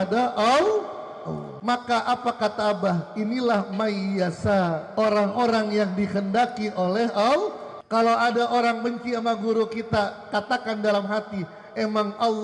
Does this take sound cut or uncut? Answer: cut